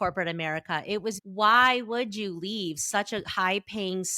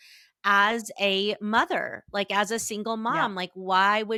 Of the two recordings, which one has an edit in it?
first; 1 cut; at 1.2 s

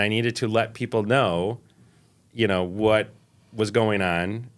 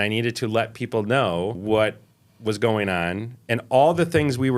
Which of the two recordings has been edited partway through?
second; 1 cut; at 1.6 s

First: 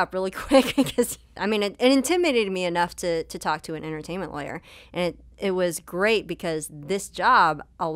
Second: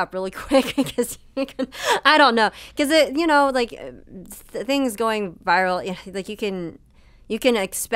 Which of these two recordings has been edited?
first; 1 cut; at 1.2 s

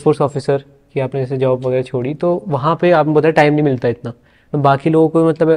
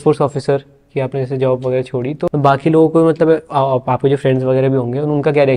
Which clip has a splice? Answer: second; 1 cut; at 2.2 s

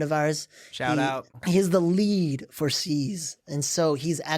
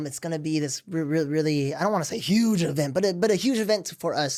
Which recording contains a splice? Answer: first; 1 cut; at 1.3 s

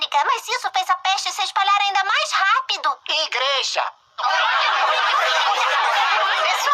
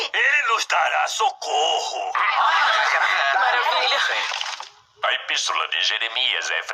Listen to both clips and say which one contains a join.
second; 2 cuts; at 1.1 s, 2.0 s

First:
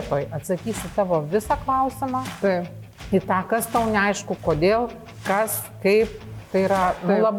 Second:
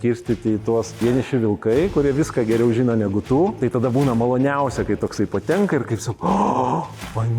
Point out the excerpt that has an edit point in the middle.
second; 2 cuts; at 1.0 s, 3.5 s

